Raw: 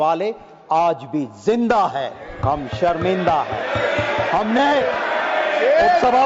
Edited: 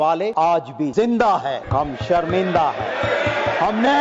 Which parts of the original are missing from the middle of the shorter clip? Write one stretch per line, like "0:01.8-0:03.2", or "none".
0:00.7-0:01.2
0:02.1-0:02.3

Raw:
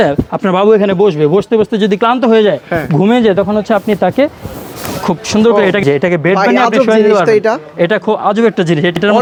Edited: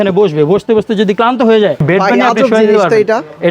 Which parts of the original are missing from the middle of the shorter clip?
0:02.6-0:06.2

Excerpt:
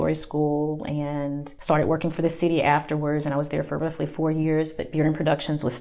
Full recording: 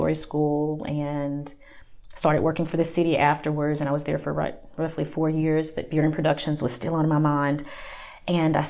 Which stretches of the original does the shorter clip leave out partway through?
0:01.5-0:02.0
0:04.3-0:04.7

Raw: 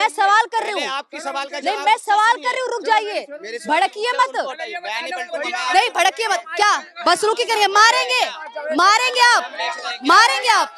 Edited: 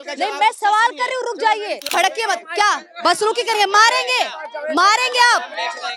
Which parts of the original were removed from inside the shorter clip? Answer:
0:03.3-0:05.9

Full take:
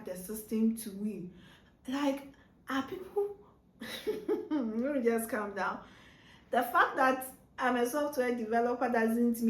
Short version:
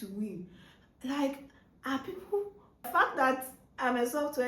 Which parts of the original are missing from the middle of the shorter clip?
0:03.7-0:06.7

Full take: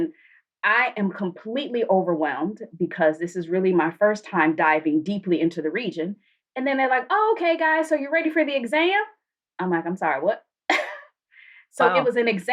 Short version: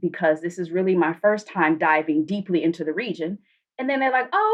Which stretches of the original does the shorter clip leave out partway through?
none

